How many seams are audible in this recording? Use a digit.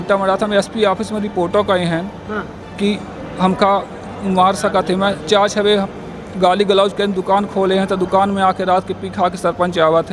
0